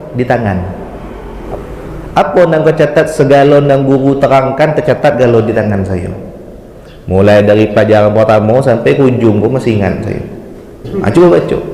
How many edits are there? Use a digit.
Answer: 2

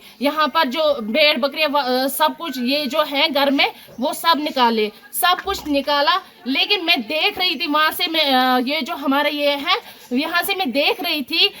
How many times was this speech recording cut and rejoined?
0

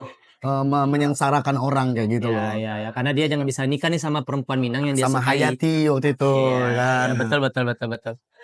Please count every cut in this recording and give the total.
0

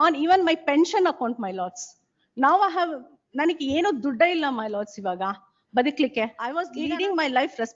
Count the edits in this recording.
1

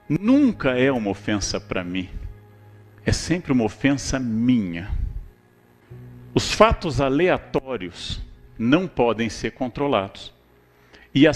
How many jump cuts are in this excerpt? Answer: 1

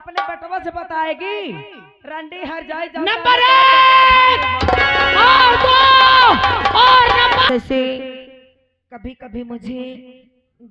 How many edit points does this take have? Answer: 1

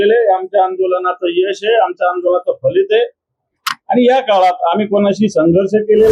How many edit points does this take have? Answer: 0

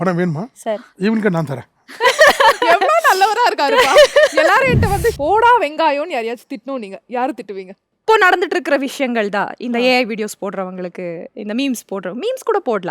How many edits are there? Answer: 1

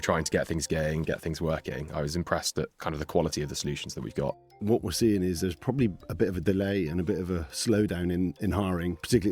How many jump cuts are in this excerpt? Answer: 2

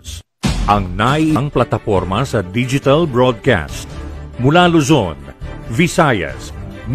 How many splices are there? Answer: 1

